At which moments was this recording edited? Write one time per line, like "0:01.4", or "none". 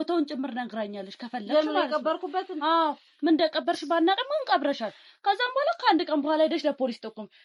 none